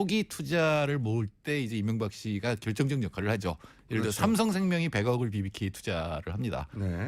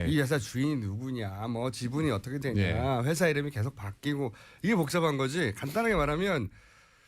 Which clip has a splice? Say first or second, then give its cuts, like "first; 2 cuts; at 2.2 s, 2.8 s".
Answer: second; 1 cut; at 5.7 s